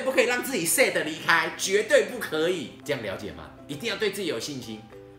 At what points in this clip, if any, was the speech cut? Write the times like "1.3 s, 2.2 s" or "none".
2.8 s